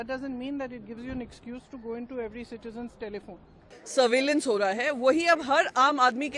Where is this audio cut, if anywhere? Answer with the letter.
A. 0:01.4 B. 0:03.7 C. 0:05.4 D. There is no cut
B